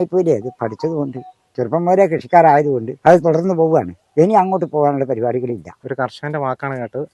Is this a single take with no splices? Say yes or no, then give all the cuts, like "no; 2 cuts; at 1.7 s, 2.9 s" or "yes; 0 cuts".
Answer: no; 2 cuts; at 2.9 s, 5.8 s